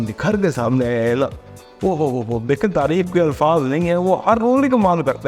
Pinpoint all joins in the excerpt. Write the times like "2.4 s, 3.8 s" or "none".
none